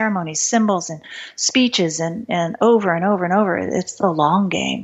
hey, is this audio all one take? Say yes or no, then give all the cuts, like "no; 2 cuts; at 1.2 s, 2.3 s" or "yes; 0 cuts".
yes; 0 cuts